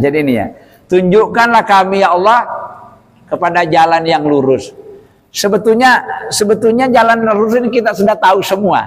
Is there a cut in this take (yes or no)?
no